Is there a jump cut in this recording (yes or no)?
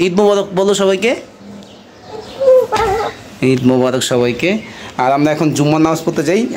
no